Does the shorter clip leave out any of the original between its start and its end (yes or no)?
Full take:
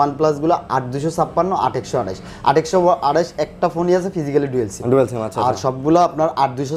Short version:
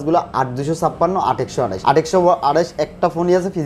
yes